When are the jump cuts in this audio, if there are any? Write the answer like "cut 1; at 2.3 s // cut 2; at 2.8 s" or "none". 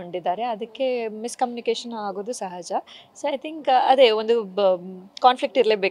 none